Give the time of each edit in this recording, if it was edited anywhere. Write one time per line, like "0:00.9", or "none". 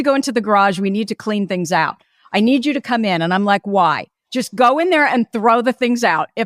none